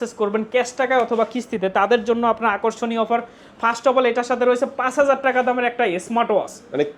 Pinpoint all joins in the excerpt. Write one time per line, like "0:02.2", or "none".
none